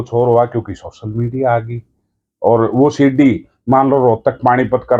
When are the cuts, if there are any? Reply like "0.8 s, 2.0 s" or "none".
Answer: none